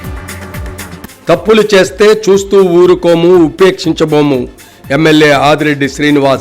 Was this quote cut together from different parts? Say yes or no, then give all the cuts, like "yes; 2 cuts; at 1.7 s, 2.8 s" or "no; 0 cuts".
yes; 1 cut; at 0.9 s